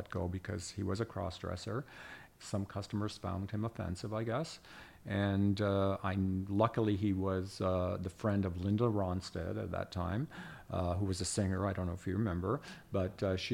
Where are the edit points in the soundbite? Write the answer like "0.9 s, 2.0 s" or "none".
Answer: 2.3 s